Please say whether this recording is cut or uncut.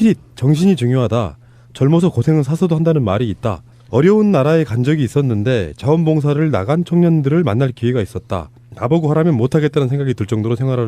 cut